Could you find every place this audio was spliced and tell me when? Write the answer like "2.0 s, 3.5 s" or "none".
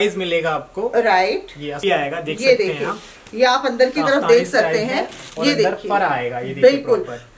1.8 s